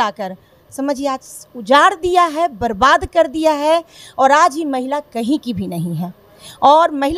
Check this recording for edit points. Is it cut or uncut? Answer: uncut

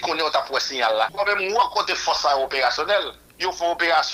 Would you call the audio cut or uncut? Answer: cut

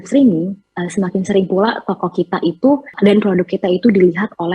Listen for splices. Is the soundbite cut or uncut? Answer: cut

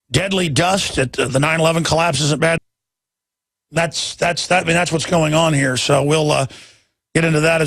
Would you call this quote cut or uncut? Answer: uncut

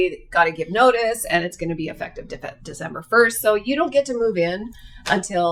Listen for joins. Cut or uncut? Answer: uncut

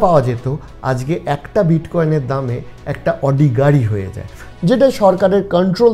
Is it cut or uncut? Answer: cut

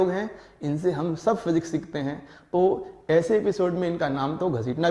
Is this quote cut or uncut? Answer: uncut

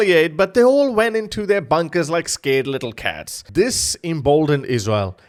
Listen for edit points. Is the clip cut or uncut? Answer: uncut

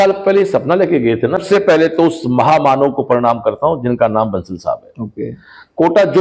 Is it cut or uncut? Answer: cut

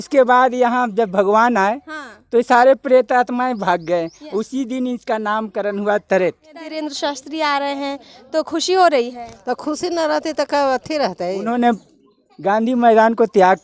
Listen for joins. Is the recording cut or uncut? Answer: cut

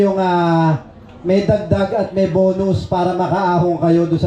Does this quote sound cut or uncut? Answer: uncut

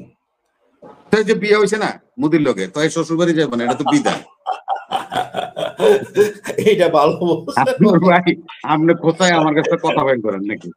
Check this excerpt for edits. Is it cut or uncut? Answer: uncut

